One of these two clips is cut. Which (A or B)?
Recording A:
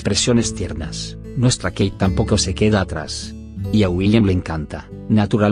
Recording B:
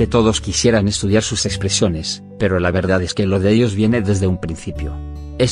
A